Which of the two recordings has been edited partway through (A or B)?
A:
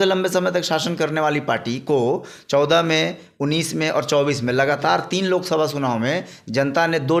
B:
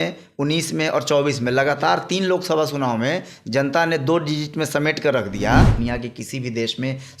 B